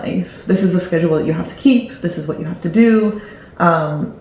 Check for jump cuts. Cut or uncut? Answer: uncut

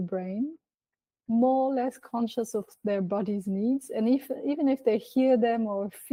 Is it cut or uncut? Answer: uncut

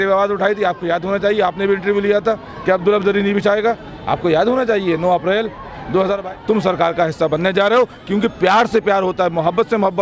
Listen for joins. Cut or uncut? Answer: cut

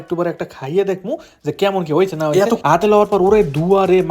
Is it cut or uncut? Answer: cut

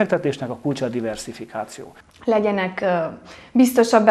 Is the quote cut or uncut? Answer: uncut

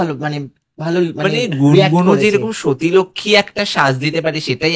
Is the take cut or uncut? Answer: uncut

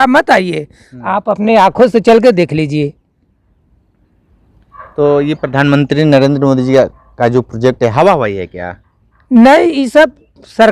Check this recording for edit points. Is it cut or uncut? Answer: uncut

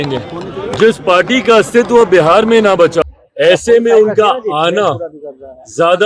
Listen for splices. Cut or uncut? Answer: cut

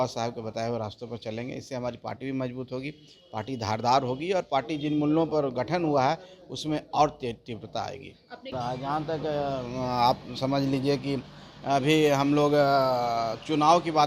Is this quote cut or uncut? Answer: cut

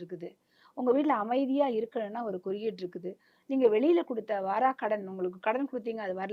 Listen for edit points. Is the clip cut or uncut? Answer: uncut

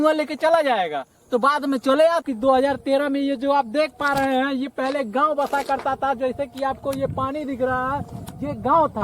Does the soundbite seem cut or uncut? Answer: cut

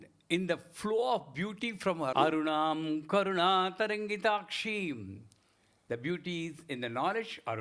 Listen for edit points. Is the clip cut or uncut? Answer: cut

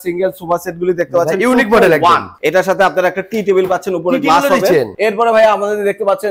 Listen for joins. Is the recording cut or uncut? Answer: cut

